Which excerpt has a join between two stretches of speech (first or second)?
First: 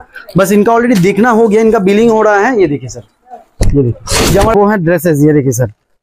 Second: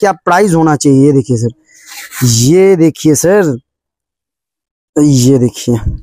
first